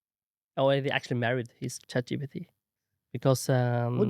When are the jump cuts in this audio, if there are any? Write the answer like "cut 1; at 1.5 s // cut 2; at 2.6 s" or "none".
cut 1; at 1.8 s